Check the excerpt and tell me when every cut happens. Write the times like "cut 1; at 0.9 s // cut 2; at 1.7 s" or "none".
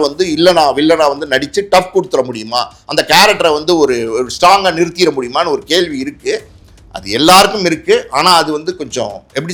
none